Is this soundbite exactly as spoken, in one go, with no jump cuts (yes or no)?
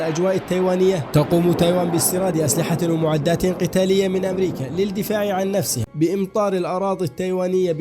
no